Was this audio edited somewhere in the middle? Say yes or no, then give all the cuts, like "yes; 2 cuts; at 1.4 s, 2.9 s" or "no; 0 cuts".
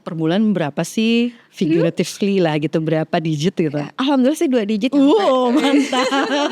no; 0 cuts